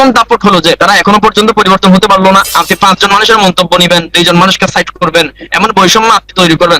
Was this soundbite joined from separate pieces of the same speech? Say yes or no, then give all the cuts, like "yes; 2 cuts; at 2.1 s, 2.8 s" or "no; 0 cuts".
yes; 1 cut; at 2.5 s